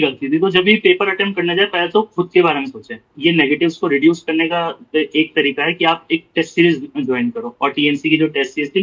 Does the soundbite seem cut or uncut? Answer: cut